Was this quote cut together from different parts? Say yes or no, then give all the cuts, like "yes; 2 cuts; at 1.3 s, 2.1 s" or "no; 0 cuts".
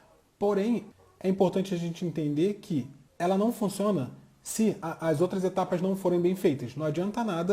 yes; 2 cuts; at 0.9 s, 4.8 s